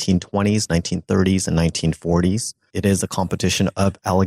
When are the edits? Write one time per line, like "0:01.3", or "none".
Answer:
0:02.7